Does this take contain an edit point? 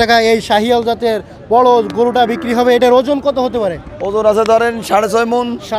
no; 0 cuts

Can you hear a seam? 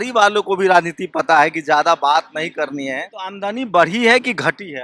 yes; 1 cut; at 3.1 s

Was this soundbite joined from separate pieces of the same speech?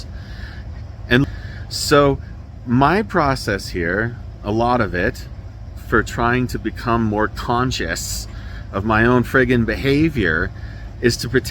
yes; 1 cut; at 1.2 s

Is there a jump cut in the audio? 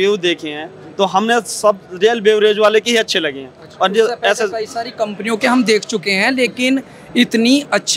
no; 0 cuts

